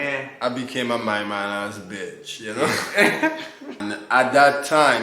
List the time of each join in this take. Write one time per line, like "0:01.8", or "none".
0:03.8